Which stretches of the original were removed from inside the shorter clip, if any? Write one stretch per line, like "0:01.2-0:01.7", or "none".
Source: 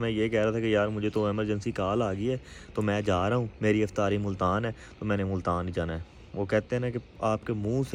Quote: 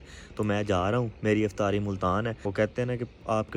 0:04.8-0:06.3

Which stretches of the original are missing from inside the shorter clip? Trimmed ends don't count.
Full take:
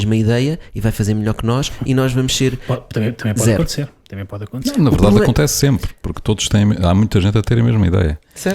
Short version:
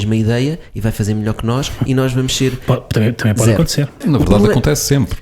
0:04.0-0:04.7

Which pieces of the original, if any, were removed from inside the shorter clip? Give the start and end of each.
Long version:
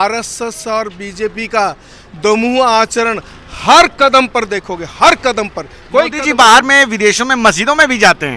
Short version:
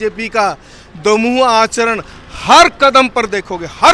none

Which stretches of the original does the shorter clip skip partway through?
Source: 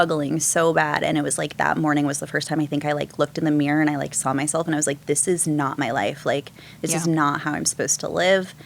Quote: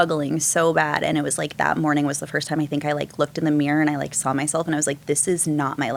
none

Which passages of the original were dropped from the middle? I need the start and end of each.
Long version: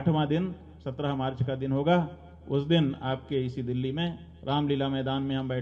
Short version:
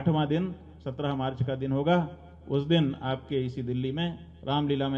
none

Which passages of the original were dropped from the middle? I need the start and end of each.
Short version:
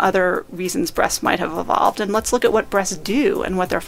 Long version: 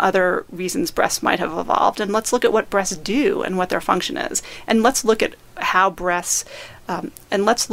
none

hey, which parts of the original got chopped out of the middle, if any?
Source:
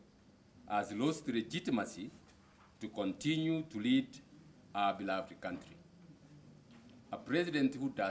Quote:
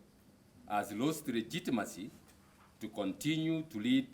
none

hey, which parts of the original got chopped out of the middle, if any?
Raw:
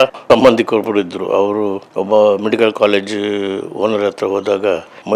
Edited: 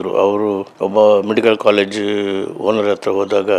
none

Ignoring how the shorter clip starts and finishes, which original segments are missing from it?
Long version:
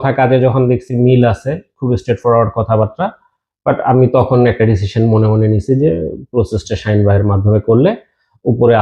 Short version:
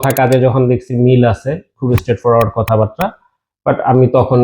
none

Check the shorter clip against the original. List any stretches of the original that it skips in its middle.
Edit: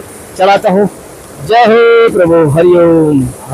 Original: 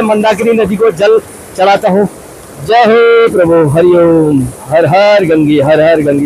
none

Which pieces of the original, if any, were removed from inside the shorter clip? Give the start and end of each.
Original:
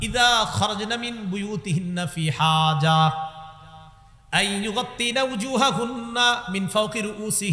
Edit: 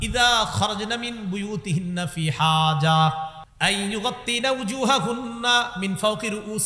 0:03.4-0:04.1

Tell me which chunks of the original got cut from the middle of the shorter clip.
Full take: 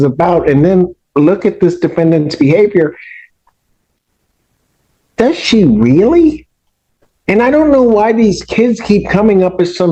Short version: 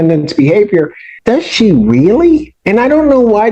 0:03.1-0:05.0
0:06.5-0:07.2

